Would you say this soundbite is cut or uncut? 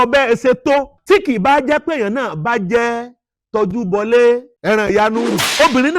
cut